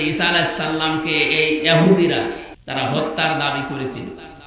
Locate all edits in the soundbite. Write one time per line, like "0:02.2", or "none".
0:02.5